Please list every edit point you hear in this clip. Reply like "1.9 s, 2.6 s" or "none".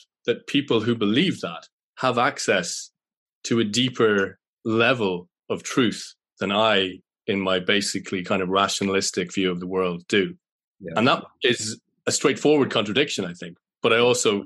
4.5 s